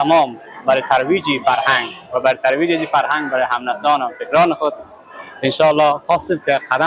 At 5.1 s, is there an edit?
no; 0 cuts

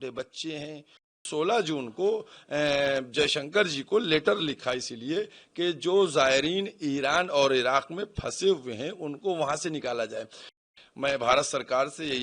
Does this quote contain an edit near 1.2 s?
yes; 2 cuts; at 1.2 s, 10.7 s

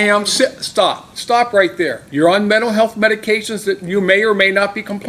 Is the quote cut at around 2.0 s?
yes; 1 cut; at 2.0 s

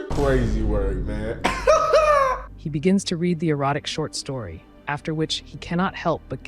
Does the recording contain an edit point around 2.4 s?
yes; 1 cut; at 2.4 s

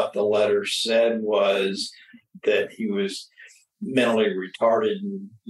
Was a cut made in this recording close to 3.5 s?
no; 1 cut; at 2.2 s

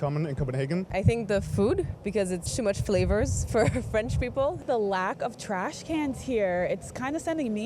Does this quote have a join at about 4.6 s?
yes; 2 cuts; at 0.9 s, 4.6 s

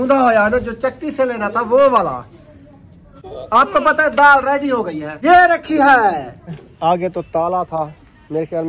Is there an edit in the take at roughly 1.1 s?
no; 2 cuts; at 5.0 s, 6.6 s

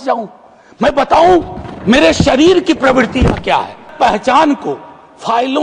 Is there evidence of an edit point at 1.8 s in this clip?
no; 1 cut; at 3.9 s

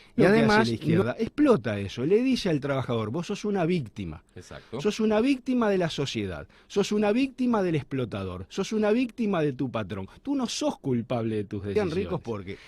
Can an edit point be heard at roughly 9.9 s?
no; 2 cuts; at 1.0 s, 11.8 s

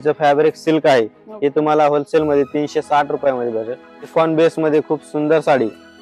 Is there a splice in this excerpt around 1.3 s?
no; 1 cut; at 4.0 s

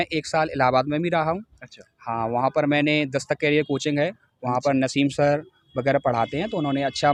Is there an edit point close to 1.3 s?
no; 0 cuts

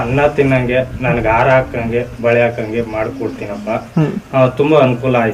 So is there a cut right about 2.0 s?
no; 1 cut; at 4.2 s

